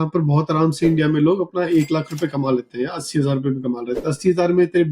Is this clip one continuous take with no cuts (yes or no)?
yes